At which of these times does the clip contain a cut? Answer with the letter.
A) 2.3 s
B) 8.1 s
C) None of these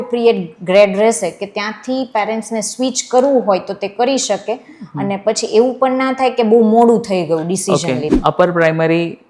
B